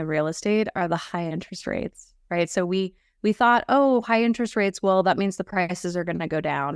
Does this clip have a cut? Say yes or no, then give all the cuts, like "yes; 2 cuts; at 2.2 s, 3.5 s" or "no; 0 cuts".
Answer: no; 0 cuts